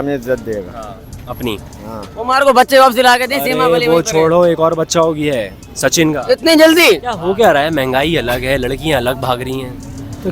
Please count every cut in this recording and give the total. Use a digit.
2